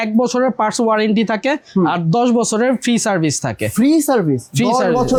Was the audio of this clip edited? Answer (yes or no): no